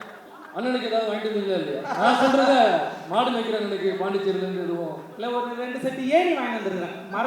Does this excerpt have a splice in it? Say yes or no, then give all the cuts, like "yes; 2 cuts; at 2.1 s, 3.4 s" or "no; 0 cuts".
no; 0 cuts